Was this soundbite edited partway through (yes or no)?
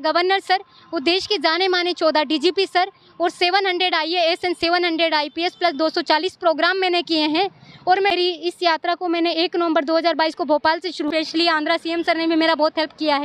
yes